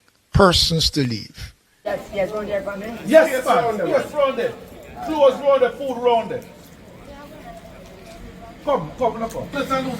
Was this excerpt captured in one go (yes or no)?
no